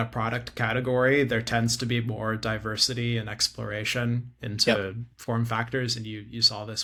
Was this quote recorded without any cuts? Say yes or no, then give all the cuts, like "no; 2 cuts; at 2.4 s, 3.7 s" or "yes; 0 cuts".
yes; 0 cuts